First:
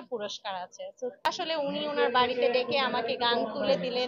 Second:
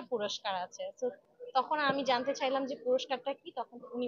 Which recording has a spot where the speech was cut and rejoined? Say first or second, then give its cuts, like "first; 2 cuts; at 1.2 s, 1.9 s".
first; 1 cut; at 1.3 s